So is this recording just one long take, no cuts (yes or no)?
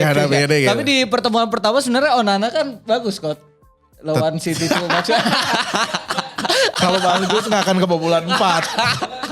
yes